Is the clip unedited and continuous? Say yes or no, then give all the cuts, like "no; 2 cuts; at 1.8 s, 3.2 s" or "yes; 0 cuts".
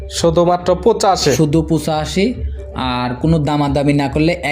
yes; 0 cuts